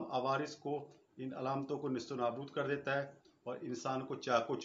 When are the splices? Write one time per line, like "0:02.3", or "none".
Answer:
none